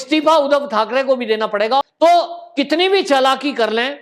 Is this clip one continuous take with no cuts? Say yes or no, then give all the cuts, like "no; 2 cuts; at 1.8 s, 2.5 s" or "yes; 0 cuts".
no; 1 cut; at 1.8 s